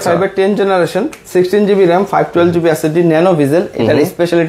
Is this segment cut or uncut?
uncut